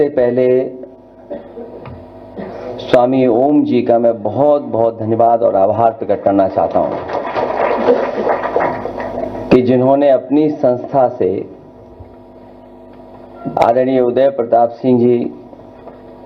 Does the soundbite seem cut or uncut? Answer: uncut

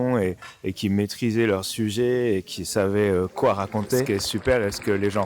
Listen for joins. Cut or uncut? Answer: cut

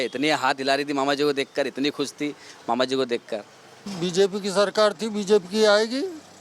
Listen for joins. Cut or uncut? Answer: cut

